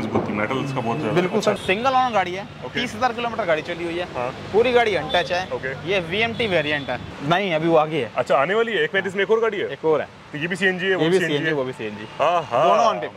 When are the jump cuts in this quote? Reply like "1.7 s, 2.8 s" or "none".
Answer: 1.6 s, 7.1 s